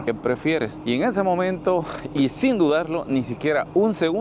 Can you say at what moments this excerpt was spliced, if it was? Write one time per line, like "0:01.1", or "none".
none